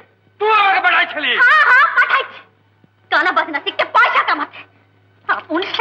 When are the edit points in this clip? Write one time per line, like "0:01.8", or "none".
none